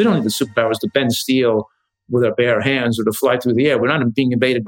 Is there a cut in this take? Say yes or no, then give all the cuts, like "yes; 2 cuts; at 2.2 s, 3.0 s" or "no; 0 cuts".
no; 0 cuts